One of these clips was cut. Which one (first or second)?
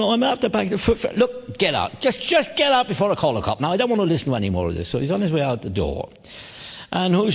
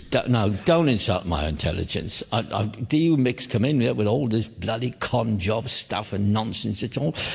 first